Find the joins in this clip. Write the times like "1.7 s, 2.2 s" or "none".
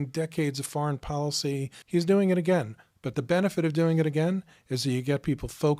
1.7 s